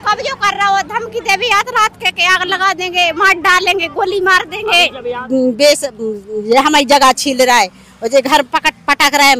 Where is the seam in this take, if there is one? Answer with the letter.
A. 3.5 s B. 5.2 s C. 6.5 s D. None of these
B